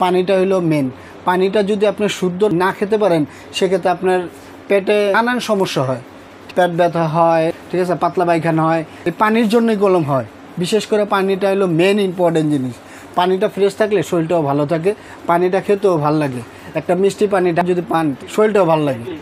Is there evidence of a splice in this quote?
yes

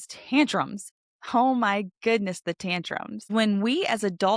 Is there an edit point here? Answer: yes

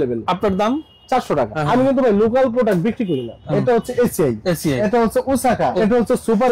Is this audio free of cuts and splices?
no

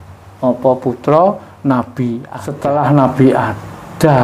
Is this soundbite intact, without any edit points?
no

